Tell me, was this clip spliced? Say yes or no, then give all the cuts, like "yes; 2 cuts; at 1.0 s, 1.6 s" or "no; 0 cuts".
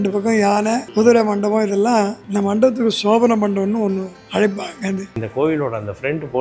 yes; 4 cuts; at 0.8 s, 2.2 s, 4.2 s, 5.2 s